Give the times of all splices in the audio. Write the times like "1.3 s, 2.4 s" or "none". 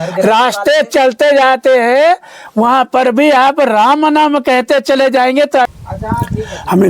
5.7 s